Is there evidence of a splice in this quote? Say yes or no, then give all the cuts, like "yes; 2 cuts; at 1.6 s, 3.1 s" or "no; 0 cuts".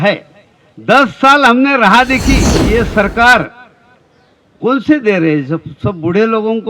yes; 1 cut; at 2.5 s